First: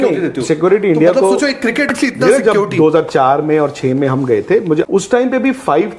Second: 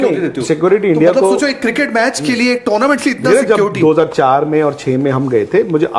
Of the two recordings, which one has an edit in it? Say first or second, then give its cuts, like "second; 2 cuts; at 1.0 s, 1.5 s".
first; 2 cuts; at 1.9 s, 5.0 s